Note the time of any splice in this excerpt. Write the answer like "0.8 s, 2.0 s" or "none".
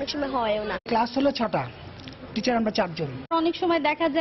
none